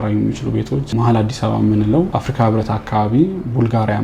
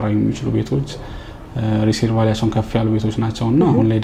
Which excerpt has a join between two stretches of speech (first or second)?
first